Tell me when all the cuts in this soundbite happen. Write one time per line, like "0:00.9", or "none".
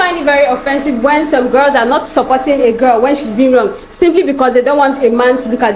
none